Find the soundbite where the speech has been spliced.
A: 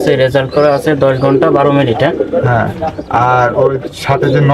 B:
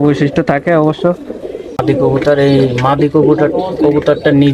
B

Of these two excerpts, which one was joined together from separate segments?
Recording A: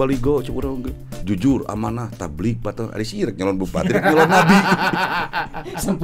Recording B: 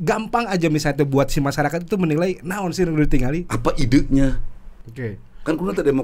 B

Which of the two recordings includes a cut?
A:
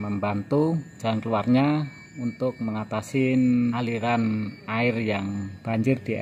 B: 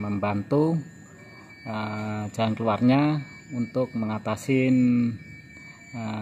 A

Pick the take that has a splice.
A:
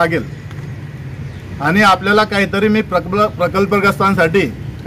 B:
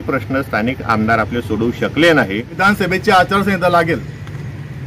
B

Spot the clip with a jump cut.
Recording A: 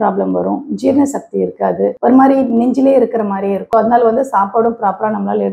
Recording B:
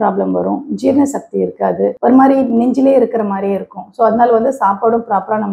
A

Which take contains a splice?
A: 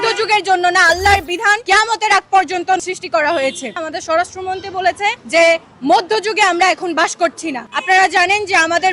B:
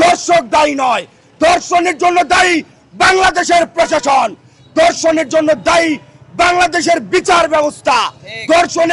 A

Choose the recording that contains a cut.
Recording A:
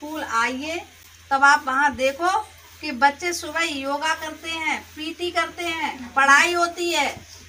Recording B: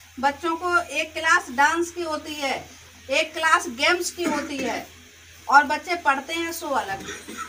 A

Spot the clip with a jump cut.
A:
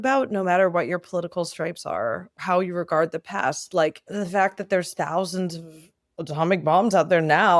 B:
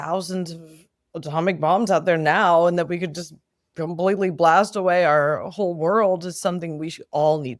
A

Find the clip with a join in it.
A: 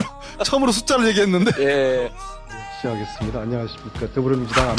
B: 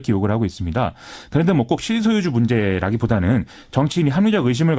B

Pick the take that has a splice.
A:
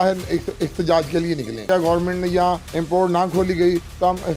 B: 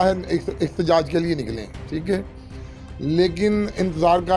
A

